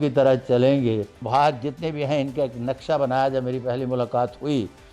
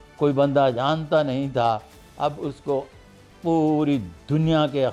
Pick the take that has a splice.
first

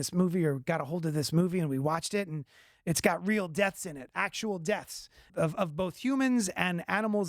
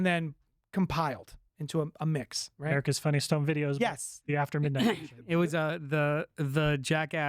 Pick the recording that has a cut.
first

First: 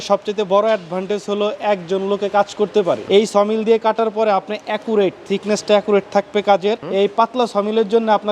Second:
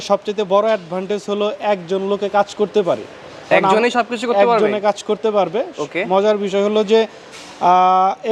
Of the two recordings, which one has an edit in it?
first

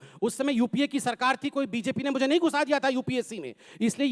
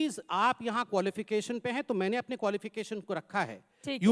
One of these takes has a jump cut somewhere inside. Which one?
first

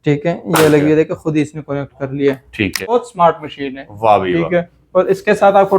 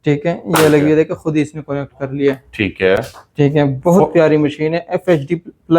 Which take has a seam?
first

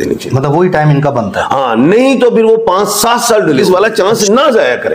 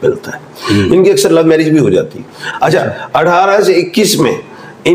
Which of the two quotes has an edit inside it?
first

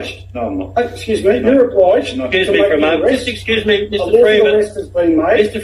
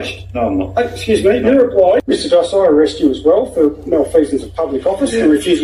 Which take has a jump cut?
second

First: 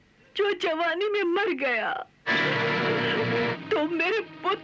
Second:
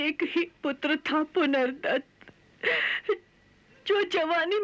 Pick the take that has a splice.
first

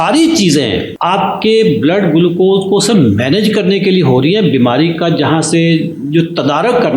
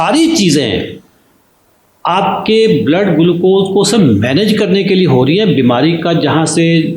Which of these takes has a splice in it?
first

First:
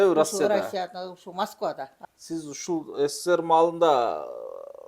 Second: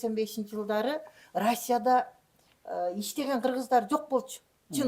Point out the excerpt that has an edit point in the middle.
first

